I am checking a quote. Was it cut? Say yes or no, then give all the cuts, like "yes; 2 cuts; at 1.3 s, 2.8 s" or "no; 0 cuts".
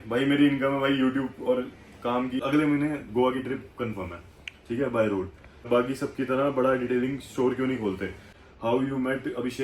yes; 3 cuts; at 2.4 s, 5.7 s, 8.4 s